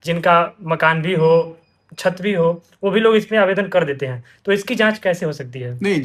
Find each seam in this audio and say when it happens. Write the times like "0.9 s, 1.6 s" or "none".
none